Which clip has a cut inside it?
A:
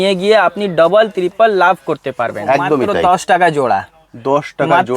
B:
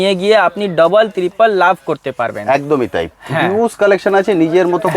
A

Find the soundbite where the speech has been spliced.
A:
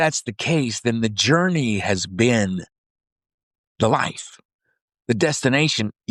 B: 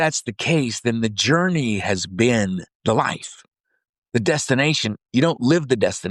B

